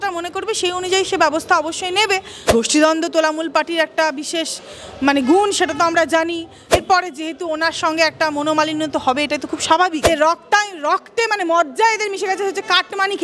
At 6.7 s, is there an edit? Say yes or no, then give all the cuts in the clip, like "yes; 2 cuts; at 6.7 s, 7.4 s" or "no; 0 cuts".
yes; 3 cuts; at 2.5 s, 6.7 s, 10.1 s